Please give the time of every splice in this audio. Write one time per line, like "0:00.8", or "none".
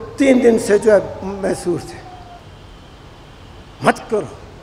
0:02.4